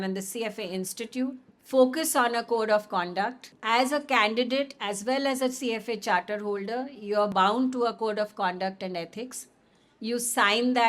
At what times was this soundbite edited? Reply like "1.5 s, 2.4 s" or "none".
1.5 s, 3.5 s